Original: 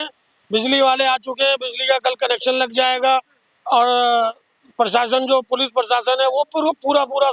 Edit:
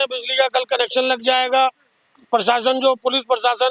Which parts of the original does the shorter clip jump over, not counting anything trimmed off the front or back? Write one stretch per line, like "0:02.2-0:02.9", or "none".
0:03.5-0:04.5